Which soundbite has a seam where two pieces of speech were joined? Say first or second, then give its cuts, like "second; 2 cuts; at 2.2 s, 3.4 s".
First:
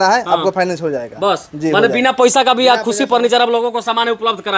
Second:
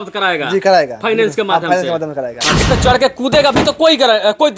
second; 1 cut; at 2.5 s